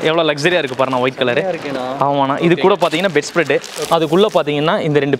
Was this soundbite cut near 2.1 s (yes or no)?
no